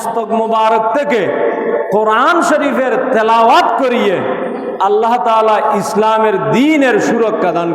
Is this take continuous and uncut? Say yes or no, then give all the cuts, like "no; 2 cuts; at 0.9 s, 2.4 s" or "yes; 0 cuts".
yes; 0 cuts